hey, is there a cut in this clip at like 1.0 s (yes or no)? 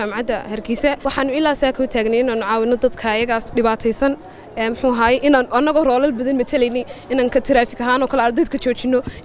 yes